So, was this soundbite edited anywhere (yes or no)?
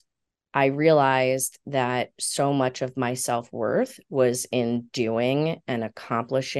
no